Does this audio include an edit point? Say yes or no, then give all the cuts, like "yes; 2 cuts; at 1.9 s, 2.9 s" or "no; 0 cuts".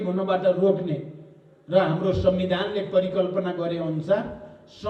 no; 0 cuts